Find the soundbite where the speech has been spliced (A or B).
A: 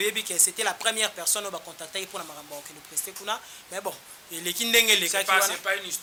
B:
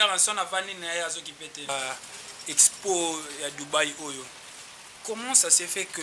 B